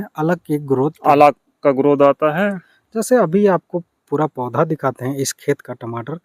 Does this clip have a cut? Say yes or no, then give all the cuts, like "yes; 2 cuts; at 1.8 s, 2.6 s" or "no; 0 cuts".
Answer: no; 0 cuts